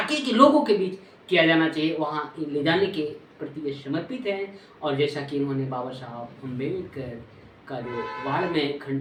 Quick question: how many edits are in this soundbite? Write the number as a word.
zero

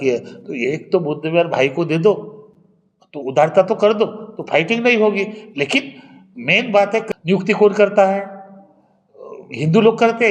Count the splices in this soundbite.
zero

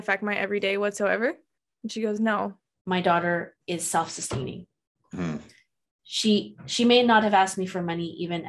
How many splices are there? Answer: one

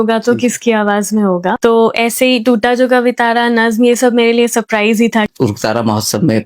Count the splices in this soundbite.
two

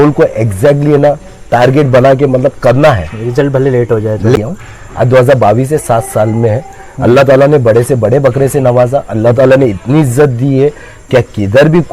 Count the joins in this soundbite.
one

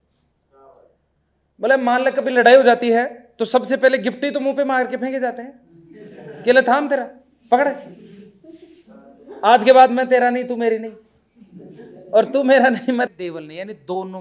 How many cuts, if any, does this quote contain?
one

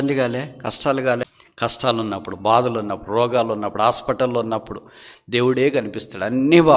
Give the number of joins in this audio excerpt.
one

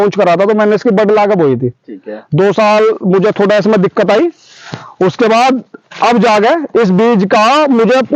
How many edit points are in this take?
zero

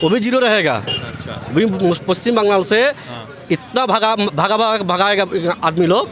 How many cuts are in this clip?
zero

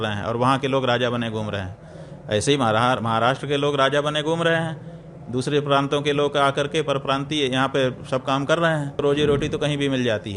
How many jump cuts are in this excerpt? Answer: one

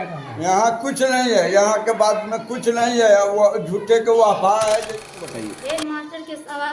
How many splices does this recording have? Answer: one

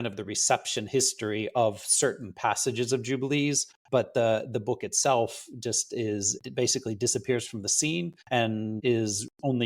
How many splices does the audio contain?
three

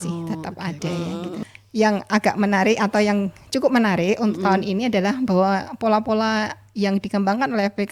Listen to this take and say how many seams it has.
one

